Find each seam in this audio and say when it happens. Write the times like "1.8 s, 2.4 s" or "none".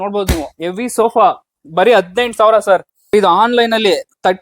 3.1 s